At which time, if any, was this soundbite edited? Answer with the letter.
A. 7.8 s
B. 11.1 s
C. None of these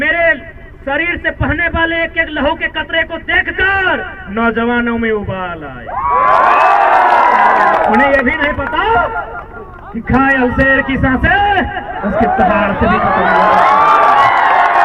A